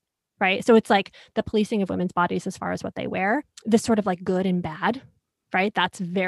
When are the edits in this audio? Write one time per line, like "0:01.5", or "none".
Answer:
0:03.5

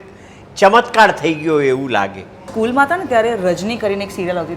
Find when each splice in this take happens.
0:02.5

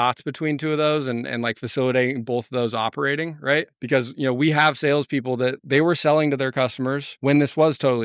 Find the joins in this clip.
0:05.6
0:07.1

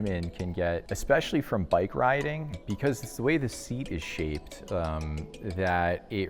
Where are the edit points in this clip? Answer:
0:00.9
0:02.5

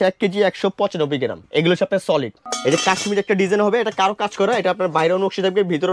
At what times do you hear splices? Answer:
0:01.4
0:02.4

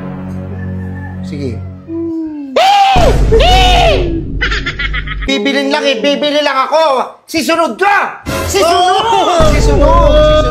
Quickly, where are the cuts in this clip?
0:05.3

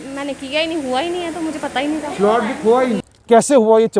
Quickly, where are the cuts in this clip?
0:03.1

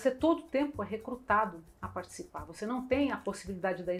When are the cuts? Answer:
none

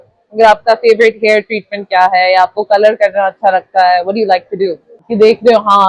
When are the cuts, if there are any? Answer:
0:05.0

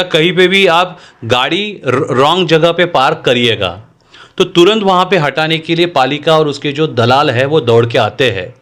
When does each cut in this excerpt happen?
none

